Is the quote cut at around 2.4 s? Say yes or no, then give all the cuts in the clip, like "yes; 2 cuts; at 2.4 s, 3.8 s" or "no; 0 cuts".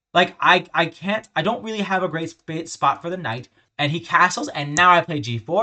no; 1 cut; at 3.6 s